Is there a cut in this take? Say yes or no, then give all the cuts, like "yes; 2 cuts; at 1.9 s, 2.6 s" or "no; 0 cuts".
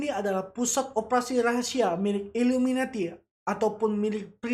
no; 0 cuts